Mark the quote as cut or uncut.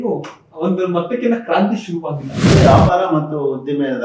cut